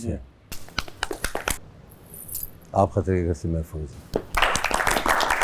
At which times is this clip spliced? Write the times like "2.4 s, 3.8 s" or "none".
1.6 s

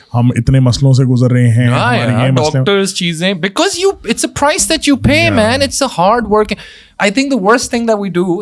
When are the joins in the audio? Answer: 6.9 s

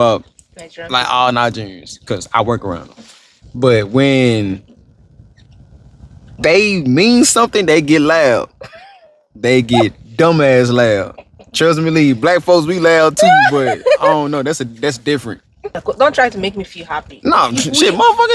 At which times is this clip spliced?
15.8 s

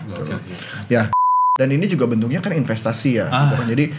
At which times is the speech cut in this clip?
1.3 s

